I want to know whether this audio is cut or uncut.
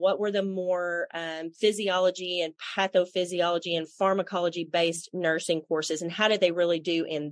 uncut